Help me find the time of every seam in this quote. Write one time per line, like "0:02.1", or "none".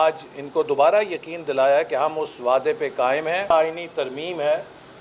0:03.5